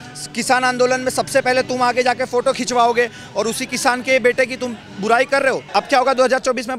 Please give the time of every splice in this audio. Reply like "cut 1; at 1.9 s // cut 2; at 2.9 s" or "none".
cut 1; at 5.6 s